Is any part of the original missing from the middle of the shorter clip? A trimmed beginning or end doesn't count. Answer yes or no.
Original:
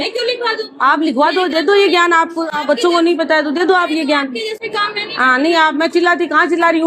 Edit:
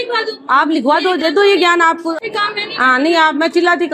yes